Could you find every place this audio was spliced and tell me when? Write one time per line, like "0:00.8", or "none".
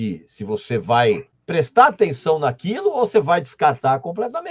0:01.3